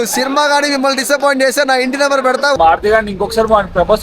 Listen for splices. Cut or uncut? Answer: cut